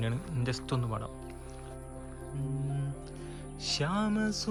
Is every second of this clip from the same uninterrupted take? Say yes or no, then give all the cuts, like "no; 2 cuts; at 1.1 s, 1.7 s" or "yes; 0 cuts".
yes; 0 cuts